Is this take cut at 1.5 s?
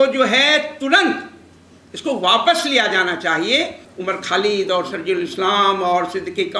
no; 1 cut; at 3.8 s

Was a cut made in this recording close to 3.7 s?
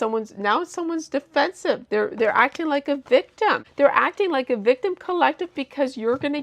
yes; 1 cut; at 3.7 s

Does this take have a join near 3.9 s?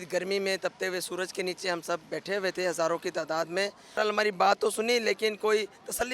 yes; 1 cut; at 3.9 s

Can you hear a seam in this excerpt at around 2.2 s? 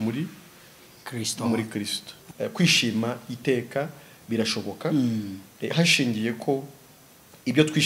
yes; 1 cut; at 2.2 s

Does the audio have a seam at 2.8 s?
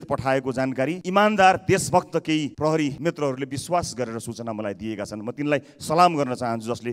yes; 2 cuts; at 1.0 s, 2.8 s

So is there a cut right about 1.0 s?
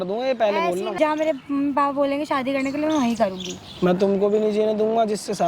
yes; 1 cut; at 1.0 s

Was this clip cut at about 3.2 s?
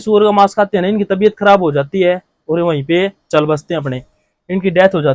no; 0 cuts

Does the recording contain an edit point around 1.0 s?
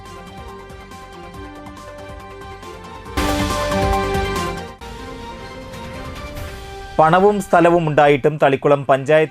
yes; 1 cut; at 1.0 s

